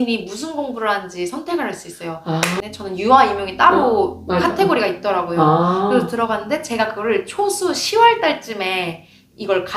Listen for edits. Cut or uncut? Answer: cut